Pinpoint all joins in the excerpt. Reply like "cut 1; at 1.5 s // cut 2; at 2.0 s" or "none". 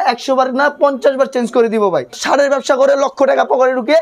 cut 1; at 2.2 s